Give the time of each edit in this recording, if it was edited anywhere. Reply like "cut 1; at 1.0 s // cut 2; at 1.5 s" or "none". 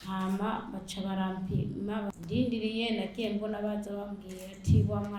cut 1; at 2.2 s